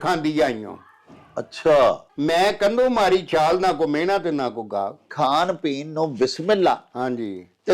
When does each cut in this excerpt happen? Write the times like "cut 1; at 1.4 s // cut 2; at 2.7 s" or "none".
cut 1; at 5.1 s